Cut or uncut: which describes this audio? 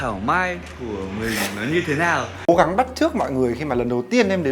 cut